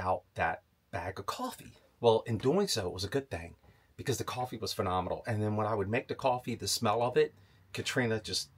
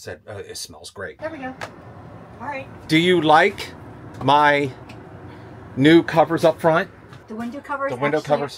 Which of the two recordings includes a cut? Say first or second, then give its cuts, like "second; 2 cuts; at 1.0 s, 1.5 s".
second; 1 cut; at 1.1 s